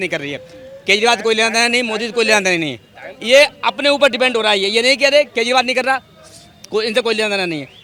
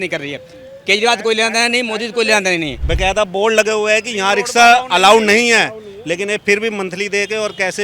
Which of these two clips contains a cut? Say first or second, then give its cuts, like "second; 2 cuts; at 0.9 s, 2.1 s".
second; 1 cut; at 2.8 s